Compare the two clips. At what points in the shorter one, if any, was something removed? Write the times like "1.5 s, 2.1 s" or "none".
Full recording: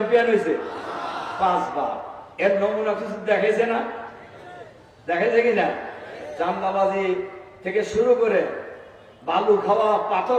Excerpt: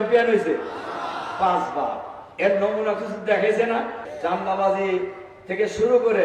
4.0 s